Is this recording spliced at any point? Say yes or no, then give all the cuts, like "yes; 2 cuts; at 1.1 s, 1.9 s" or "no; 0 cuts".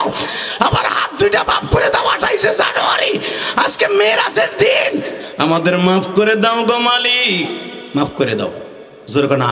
no; 0 cuts